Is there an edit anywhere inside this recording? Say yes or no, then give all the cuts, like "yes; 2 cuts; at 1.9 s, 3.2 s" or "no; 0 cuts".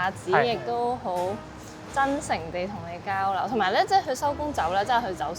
no; 0 cuts